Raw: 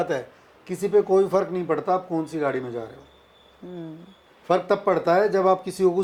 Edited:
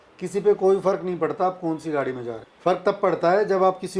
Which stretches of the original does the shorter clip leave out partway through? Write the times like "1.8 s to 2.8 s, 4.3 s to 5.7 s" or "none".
2.9 s to 4.3 s